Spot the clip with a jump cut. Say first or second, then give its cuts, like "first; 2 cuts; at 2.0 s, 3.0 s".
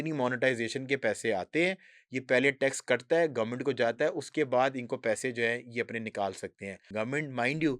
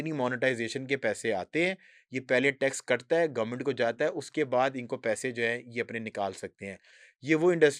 first; 1 cut; at 6.8 s